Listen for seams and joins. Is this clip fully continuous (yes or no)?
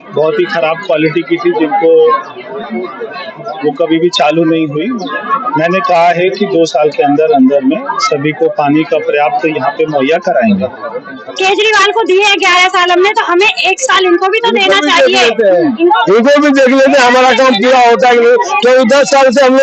no